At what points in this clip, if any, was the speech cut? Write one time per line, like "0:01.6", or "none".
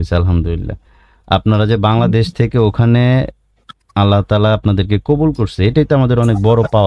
none